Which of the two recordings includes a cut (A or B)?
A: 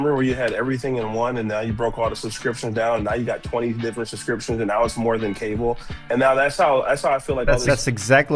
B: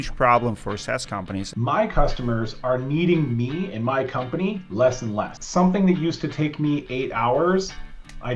B